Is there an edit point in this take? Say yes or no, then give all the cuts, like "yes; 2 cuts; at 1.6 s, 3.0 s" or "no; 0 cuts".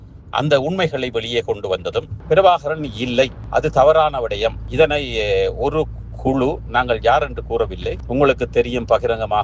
yes; 1 cut; at 2.1 s